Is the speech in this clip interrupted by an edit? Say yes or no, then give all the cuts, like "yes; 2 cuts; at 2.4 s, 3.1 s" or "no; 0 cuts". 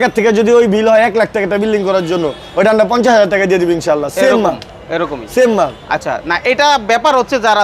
no; 0 cuts